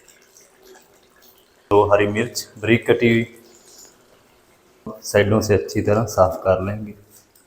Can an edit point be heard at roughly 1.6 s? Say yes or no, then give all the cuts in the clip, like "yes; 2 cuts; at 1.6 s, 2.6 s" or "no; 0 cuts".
yes; 2 cuts; at 1.6 s, 5.0 s